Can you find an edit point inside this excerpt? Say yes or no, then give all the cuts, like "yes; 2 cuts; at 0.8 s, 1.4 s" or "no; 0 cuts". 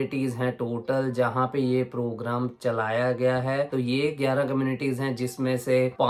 no; 0 cuts